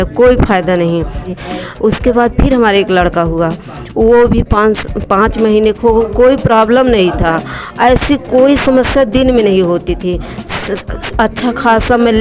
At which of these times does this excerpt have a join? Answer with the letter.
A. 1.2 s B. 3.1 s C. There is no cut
A